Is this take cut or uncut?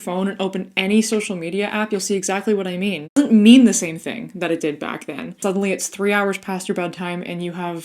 cut